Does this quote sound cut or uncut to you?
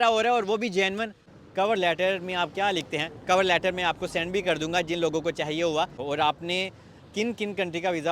cut